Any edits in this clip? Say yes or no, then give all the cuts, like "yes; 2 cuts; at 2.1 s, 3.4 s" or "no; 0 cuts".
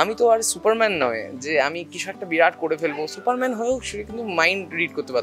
no; 0 cuts